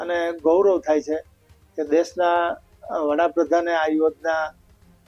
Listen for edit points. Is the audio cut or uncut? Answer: uncut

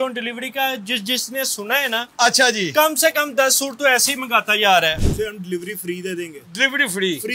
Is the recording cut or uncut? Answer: cut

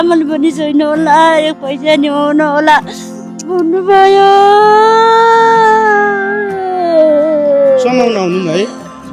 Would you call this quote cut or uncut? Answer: uncut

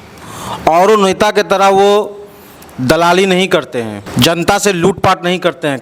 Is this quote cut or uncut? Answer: cut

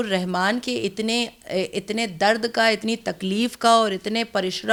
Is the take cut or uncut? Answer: uncut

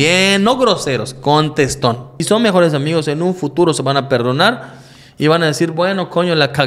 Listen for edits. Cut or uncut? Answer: cut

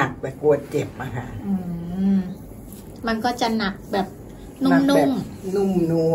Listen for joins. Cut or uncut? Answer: uncut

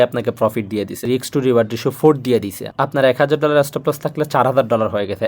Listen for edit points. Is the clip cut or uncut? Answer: cut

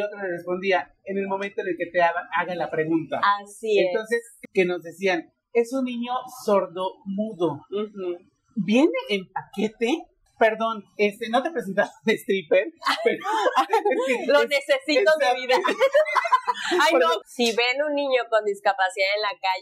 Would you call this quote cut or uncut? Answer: cut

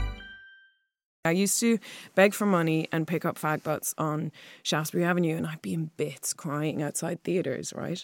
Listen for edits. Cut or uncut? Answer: cut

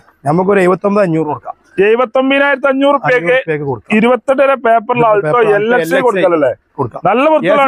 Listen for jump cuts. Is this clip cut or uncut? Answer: uncut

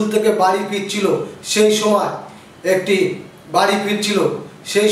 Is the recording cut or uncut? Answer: uncut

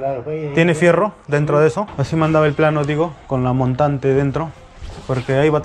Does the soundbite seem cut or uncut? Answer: cut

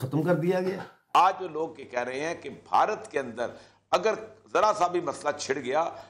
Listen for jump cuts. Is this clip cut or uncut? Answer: cut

